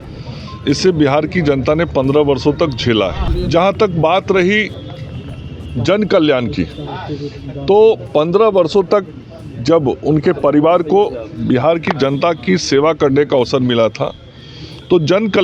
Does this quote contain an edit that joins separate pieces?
yes; 1 cut; at 3.2 s

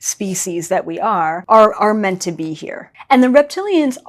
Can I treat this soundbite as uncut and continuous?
no; 2 cuts; at 1.4 s, 2.9 s

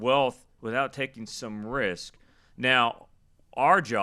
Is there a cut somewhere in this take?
no; 0 cuts

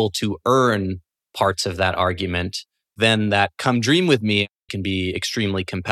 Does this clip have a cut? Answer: yes; 2 cuts; at 3.0 s, 4.7 s

